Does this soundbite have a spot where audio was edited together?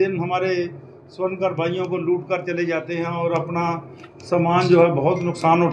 no; 0 cuts

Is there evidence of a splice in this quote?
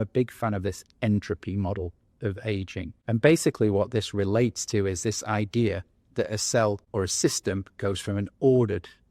yes; 2 cuts; at 2.9 s, 6.8 s

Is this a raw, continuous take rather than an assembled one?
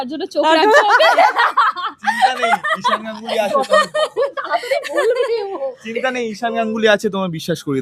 yes; 0 cuts

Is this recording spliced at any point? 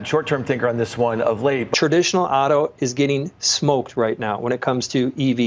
yes; 1 cut; at 1.7 s

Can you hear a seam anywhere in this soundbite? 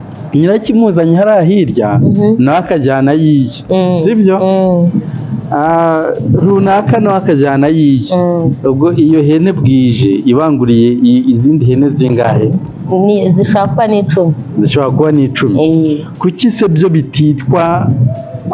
no; 0 cuts

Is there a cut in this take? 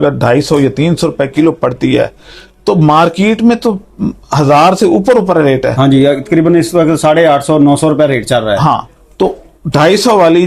no; 0 cuts

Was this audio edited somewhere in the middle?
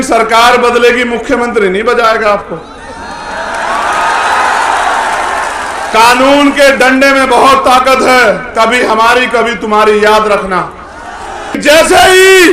yes; 1 cut; at 11.6 s

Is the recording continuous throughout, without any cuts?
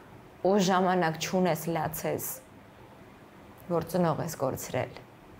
yes; 0 cuts

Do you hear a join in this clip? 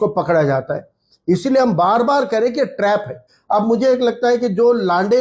yes; 1 cut; at 3.3 s

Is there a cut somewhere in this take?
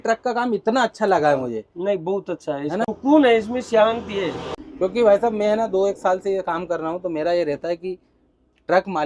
no; 0 cuts

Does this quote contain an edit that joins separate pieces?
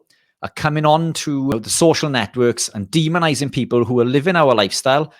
yes; 1 cut; at 1.5 s

